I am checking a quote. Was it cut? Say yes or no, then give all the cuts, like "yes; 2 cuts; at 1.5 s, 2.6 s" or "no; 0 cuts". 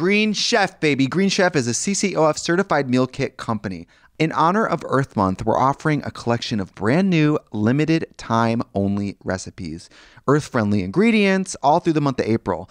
yes; 1 cut; at 4.0 s